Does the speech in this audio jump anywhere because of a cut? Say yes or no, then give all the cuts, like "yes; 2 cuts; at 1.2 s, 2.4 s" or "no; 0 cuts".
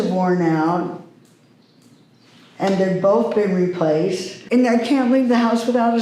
yes; 1 cut; at 4.3 s